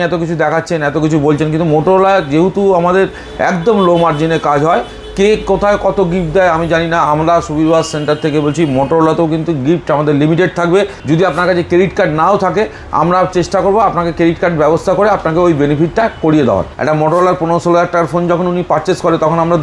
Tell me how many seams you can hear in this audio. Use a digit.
2